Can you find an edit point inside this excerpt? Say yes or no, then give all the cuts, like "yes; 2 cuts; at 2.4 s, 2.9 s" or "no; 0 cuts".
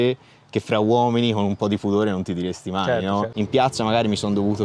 yes; 1 cut; at 3.3 s